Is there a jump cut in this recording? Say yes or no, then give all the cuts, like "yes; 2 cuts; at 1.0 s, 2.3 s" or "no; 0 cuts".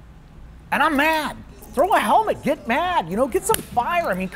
yes; 1 cut; at 1.6 s